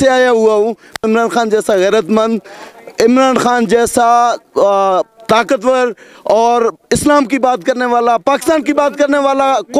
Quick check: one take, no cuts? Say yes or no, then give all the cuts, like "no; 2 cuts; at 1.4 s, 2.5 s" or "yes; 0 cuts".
no; 1 cut; at 1.0 s